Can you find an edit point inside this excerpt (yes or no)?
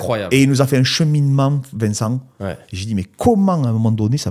no